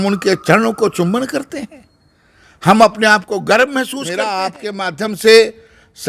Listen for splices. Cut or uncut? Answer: cut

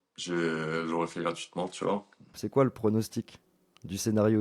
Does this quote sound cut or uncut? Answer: cut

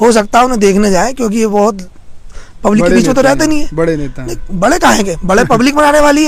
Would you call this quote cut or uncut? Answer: uncut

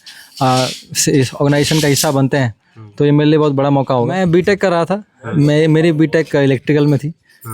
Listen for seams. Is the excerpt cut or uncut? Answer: cut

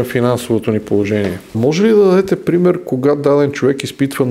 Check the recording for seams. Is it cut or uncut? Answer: cut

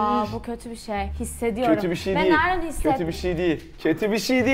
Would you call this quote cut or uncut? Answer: uncut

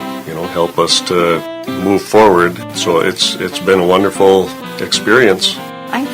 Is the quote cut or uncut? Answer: uncut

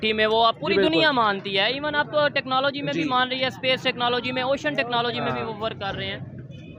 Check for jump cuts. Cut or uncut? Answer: uncut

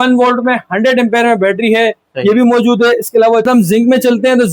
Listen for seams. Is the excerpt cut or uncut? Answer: cut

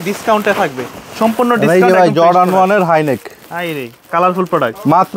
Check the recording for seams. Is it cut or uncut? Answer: uncut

